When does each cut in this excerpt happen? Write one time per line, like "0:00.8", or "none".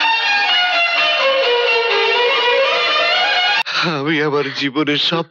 0:03.6